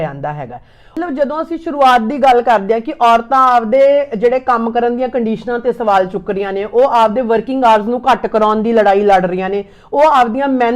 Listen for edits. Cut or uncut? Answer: cut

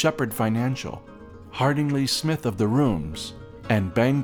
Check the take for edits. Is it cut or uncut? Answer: uncut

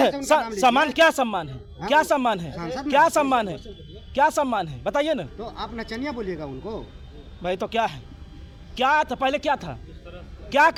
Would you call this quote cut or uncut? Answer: uncut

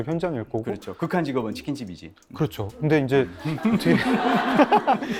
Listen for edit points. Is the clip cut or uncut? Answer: uncut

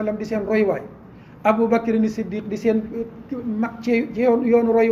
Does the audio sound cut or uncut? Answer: uncut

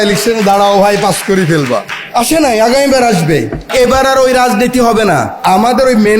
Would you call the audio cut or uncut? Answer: cut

